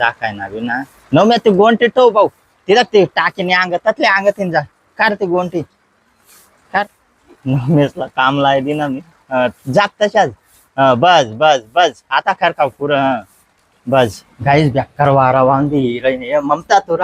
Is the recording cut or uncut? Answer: cut